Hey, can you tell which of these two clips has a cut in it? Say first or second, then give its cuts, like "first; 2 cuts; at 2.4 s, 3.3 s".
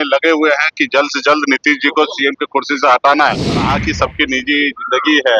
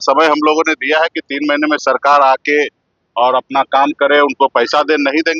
first; 1 cut; at 3.8 s